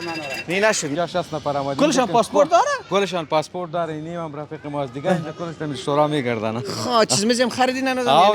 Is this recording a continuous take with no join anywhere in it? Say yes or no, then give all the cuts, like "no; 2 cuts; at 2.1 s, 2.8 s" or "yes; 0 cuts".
no; 1 cut; at 0.9 s